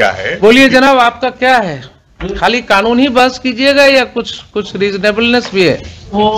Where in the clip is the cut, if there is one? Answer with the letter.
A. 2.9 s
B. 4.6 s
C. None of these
C